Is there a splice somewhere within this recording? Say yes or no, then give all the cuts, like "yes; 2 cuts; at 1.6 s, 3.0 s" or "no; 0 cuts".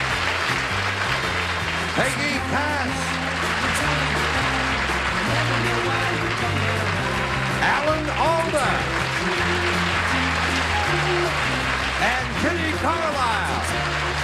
no; 0 cuts